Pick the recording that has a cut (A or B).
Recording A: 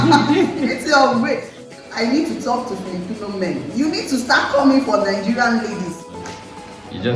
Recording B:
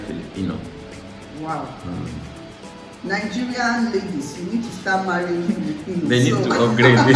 A